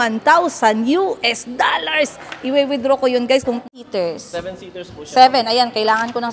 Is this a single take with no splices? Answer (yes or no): no